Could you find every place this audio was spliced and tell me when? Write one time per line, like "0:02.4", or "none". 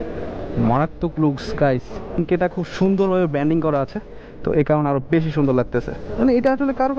0:02.2
0:06.0